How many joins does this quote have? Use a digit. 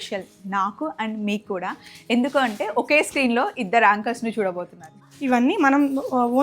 1